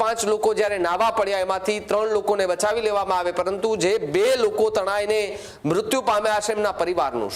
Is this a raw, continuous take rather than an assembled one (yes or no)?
yes